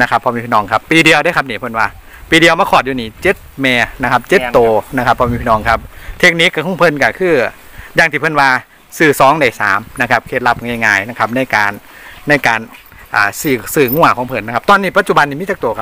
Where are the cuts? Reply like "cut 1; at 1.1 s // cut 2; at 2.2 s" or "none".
none